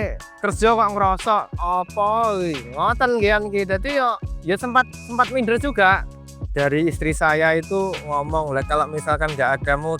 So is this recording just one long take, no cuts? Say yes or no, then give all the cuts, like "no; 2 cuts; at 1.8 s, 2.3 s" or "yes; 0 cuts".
no; 2 cuts; at 1.5 s, 6.3 s